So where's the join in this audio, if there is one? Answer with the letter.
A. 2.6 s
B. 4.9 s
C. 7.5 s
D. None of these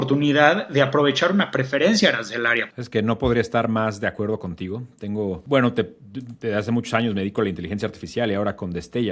A